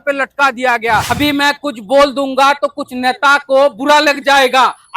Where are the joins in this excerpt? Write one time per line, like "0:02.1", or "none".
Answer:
0:01.1

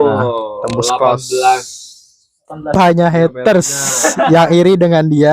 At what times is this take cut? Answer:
0:02.8

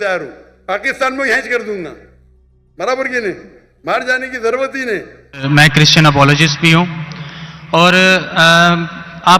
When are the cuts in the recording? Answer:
0:05.4

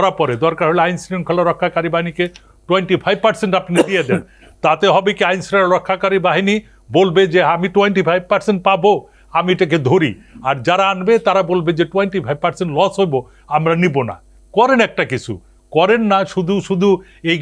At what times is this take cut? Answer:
none

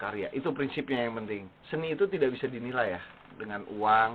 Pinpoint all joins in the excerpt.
0:01.5

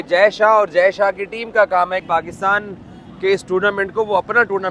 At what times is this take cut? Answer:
0:02.0

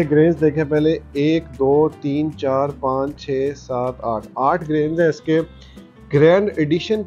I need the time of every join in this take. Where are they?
none

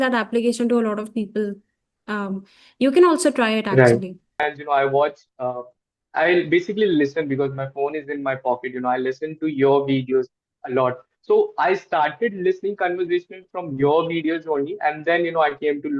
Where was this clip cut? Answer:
0:04.3

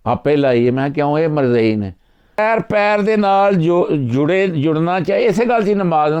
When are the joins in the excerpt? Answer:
0:02.4

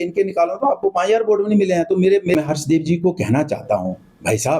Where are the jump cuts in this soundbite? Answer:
0:02.3

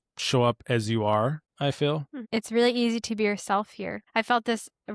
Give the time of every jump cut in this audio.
0:01.5
0:02.1
0:04.0

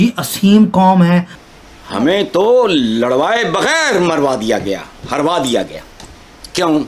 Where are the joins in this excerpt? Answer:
0:01.3

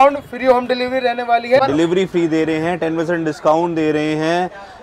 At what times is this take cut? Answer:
0:01.6

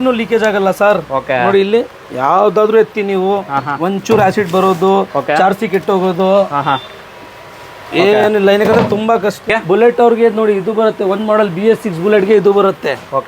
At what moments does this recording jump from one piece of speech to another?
0:09.4

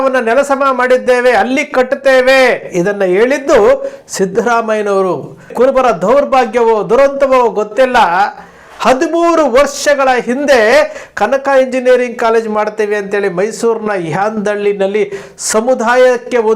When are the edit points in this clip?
0:05.5

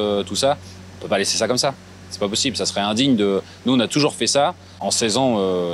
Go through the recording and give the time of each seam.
0:04.7

